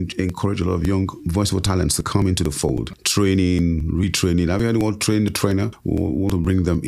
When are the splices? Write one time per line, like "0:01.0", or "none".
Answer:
0:01.2
0:03.0
0:05.8